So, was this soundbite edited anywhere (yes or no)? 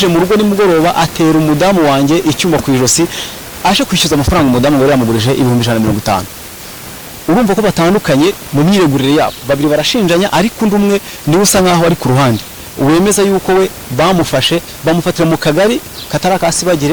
no